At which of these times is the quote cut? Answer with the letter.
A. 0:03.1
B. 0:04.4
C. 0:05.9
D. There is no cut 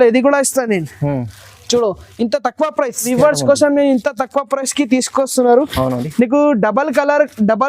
A